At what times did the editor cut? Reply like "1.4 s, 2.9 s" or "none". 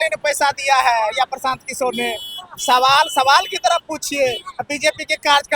none